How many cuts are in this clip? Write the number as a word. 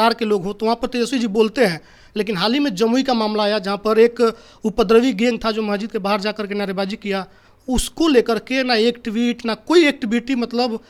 zero